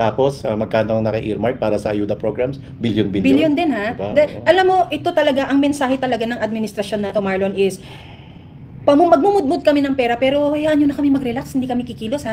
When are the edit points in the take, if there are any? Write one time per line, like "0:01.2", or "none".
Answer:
none